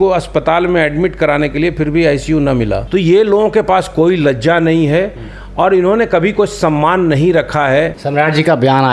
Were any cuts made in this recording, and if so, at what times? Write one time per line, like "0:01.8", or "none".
0:02.8
0:08.0